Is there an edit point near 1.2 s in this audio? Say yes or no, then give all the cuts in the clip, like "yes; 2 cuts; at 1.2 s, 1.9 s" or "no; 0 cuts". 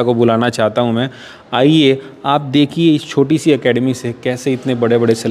no; 0 cuts